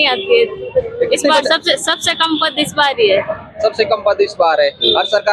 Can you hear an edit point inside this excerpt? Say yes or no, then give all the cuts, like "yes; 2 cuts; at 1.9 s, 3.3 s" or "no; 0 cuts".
no; 0 cuts